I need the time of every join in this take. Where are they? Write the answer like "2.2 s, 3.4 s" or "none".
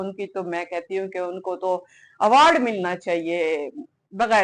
none